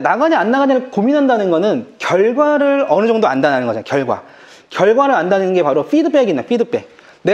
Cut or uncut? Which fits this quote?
uncut